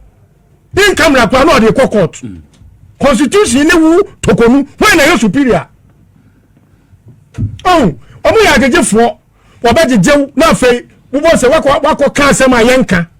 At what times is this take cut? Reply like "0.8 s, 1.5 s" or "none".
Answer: 10.3 s